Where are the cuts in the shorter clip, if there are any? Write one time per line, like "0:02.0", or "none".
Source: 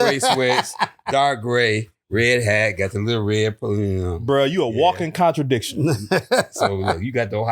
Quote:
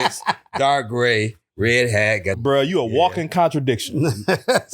0:02.4